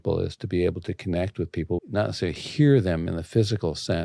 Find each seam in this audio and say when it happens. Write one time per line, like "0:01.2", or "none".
0:01.8